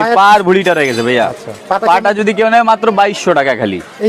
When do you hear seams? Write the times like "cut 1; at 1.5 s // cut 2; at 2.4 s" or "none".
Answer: none